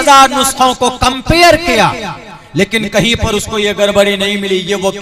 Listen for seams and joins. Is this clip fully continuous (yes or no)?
yes